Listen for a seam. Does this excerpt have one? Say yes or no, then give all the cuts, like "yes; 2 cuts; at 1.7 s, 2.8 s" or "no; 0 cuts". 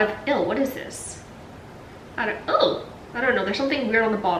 no; 0 cuts